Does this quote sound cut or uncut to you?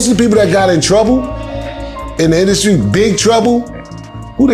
uncut